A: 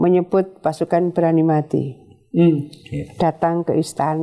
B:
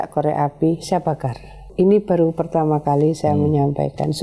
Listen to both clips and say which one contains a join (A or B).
B